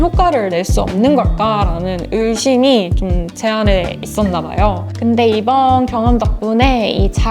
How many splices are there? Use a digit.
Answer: 1